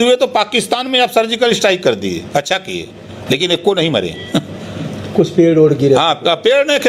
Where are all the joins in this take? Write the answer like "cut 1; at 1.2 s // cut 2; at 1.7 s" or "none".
none